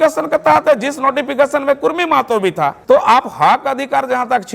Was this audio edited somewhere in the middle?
yes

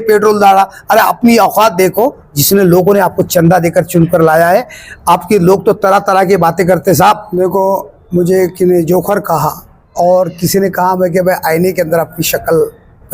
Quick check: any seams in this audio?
yes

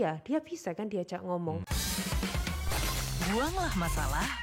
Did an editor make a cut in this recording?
yes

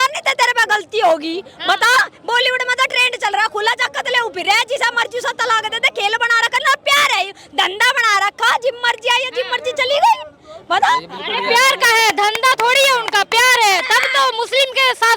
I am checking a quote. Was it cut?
no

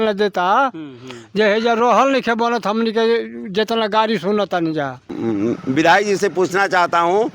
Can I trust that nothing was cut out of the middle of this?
no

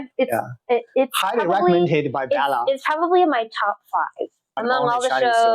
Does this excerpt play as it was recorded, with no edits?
no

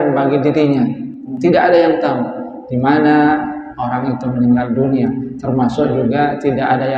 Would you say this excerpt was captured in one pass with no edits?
no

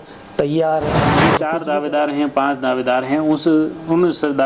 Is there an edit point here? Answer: yes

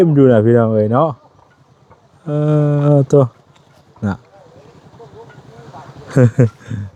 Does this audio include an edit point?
no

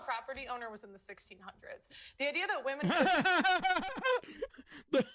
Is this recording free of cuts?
yes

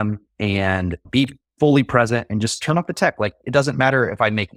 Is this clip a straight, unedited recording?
yes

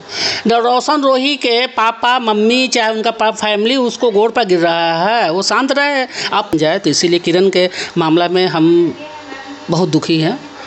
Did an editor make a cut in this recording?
yes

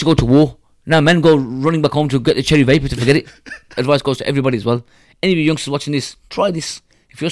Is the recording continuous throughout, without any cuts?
no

